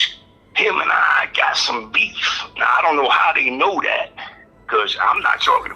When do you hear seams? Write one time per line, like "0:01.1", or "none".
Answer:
none